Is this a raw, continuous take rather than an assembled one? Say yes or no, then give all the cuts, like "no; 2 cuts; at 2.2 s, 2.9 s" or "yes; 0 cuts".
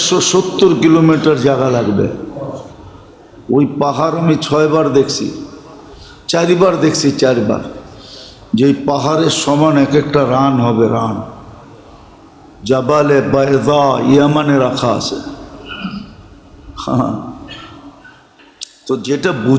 no; 1 cut; at 18.5 s